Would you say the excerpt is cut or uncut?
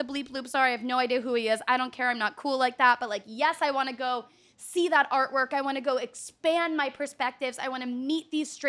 uncut